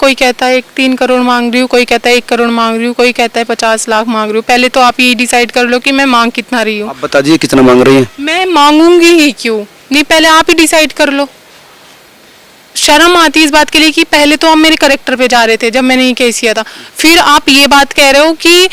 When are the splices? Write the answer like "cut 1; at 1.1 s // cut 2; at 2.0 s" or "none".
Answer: none